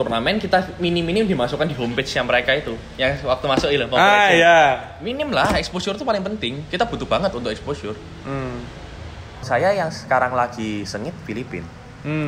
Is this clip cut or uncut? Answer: cut